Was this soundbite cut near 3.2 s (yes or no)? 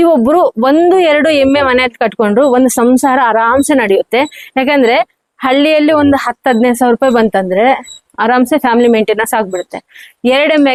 no